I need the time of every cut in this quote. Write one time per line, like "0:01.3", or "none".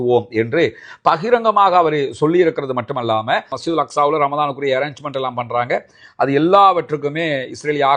0:03.6